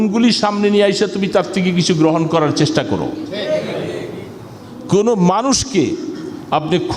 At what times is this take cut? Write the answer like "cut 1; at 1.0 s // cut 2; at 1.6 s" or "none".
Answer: cut 1; at 4.7 s

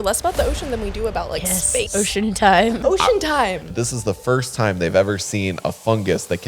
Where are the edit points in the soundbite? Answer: cut 1; at 1.9 s // cut 2; at 2.8 s // cut 3; at 3.6 s

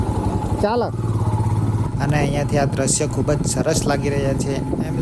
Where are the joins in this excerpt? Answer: cut 1; at 1.9 s

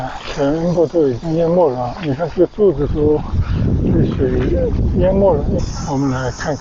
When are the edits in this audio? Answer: cut 1; at 5.6 s

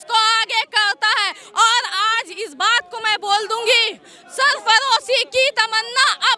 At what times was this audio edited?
none

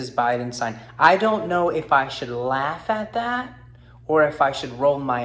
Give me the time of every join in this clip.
none

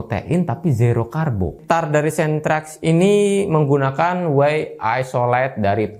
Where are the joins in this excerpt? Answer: cut 1; at 1.6 s

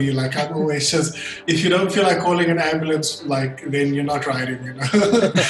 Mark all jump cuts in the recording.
cut 1; at 1.3 s

